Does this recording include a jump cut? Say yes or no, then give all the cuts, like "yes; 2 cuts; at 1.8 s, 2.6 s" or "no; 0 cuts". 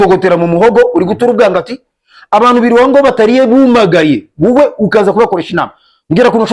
no; 0 cuts